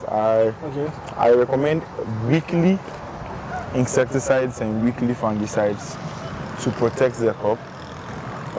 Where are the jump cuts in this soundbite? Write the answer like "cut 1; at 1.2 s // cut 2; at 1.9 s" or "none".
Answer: none